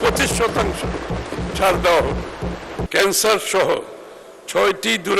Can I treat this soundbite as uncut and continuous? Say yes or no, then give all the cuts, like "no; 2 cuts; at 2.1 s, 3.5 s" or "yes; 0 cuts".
no; 1 cut; at 2.7 s